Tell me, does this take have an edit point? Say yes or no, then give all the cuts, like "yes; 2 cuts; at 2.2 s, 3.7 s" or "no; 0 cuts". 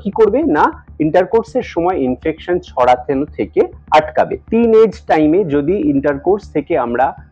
yes; 1 cut; at 4.4 s